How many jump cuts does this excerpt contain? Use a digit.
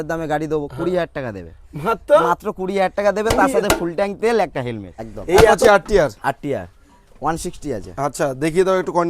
1